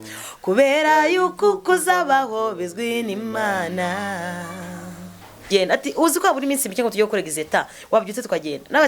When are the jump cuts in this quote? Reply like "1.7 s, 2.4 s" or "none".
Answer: 5.5 s